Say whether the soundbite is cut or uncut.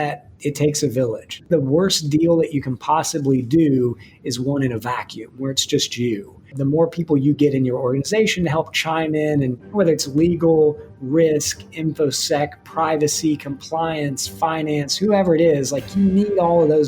cut